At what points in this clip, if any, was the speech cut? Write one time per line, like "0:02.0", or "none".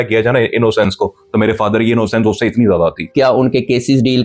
0:03.1